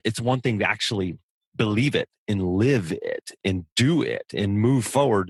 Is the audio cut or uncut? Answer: uncut